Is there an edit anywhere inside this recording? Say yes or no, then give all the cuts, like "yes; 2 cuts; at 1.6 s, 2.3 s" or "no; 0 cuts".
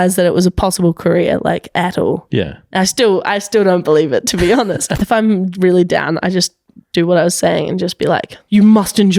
yes; 2 cuts; at 4.8 s, 8.3 s